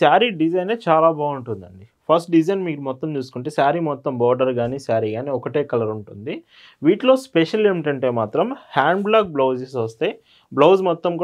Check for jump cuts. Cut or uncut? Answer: uncut